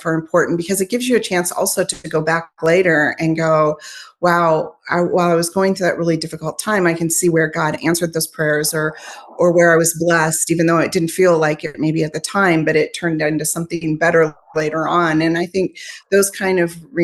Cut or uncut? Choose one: uncut